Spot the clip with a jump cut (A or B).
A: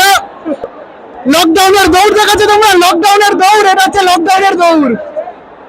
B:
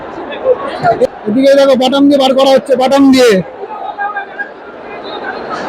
B